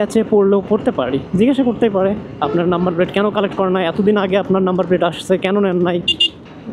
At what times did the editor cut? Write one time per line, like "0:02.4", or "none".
none